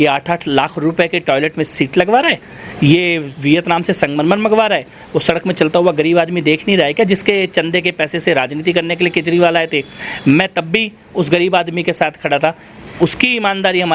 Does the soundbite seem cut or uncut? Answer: uncut